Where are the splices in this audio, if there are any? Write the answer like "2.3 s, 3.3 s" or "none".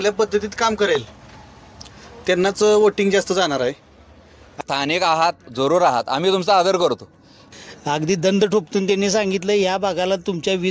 4.6 s, 7.4 s